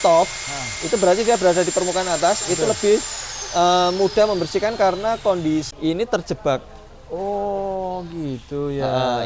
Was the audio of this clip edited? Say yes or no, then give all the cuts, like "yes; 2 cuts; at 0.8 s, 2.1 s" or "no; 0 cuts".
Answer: yes; 1 cut; at 5.7 s